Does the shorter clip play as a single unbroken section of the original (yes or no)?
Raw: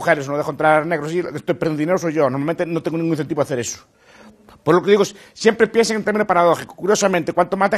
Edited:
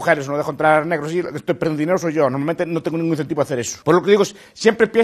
no